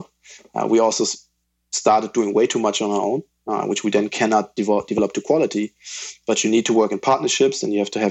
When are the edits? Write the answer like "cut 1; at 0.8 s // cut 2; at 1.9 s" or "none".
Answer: none